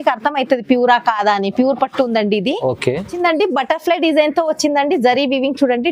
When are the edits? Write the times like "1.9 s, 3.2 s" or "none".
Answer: 3.2 s